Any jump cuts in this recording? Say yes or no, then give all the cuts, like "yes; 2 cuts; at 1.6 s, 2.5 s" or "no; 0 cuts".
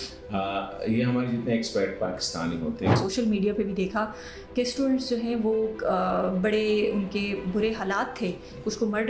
yes; 1 cut; at 2.9 s